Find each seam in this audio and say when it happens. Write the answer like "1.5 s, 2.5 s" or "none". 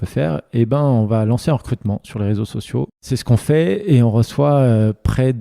2.9 s